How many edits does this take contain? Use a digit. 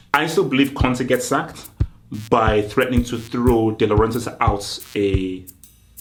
0